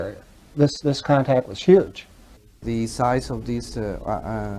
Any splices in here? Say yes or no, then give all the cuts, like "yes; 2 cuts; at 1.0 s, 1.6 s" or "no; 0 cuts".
yes; 1 cut; at 2.6 s